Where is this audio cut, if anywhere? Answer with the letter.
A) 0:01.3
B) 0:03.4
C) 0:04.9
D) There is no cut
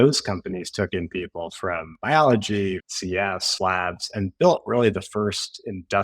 B